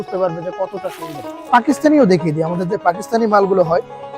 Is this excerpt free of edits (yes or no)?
no